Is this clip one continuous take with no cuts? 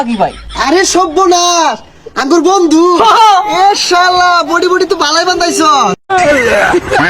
no; 1 cut; at 6.0 s

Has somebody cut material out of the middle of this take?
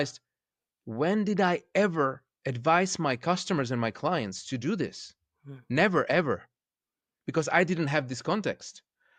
no; 0 cuts

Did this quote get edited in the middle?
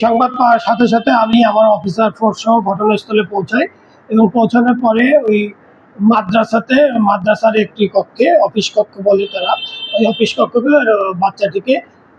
no; 0 cuts

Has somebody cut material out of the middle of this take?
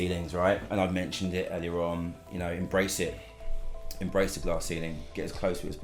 no; 0 cuts

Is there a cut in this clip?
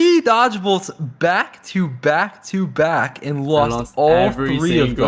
no; 0 cuts

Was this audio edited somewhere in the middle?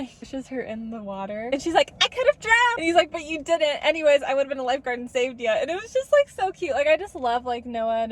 no; 0 cuts

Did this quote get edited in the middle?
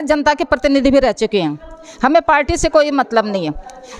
no; 0 cuts

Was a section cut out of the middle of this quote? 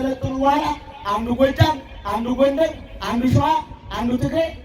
no; 0 cuts

